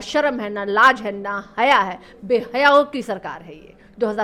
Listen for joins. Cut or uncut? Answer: uncut